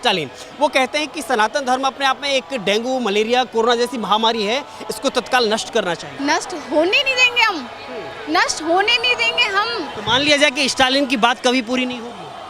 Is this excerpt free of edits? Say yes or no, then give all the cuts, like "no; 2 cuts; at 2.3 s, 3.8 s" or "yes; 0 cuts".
no; 2 cuts; at 6.1 s, 9.9 s